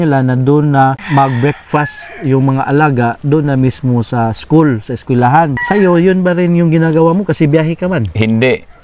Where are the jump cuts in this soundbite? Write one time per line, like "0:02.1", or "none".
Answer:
0:01.0
0:05.6